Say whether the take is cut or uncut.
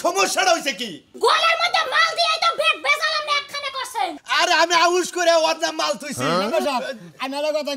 cut